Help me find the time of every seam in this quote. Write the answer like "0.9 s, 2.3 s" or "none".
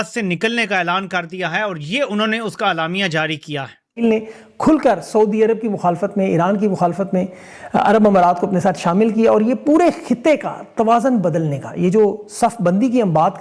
4.0 s